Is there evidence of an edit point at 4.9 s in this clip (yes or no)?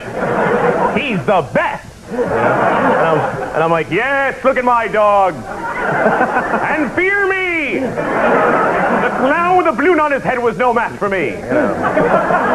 no